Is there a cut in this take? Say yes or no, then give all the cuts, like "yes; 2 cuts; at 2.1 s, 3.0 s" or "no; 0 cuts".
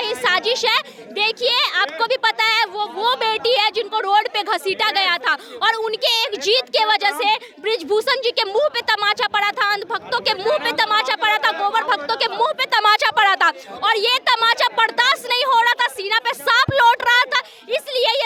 no; 0 cuts